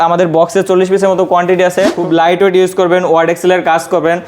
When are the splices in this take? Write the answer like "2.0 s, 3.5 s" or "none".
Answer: 2.0 s